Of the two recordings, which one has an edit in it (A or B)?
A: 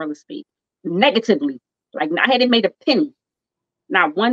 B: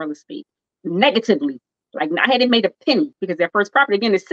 B